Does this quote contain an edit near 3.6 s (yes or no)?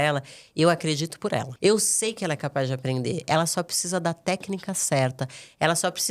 no